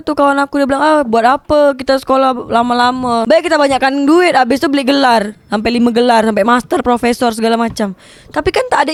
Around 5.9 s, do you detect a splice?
no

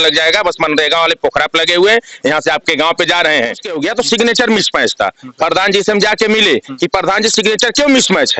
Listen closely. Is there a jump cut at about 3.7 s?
yes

